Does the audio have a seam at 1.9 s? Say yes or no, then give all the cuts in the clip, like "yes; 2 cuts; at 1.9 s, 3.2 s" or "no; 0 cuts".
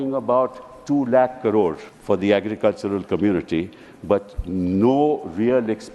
yes; 1 cut; at 1.9 s